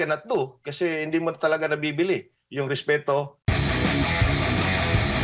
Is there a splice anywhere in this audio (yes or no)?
yes